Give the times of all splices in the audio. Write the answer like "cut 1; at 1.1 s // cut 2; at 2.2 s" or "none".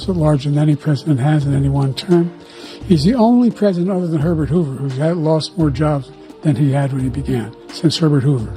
none